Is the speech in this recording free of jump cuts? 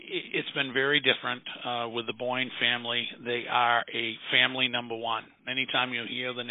yes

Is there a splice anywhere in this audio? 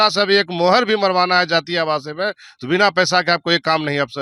no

